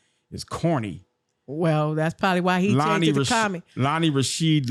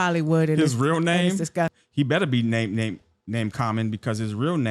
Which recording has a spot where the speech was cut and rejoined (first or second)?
second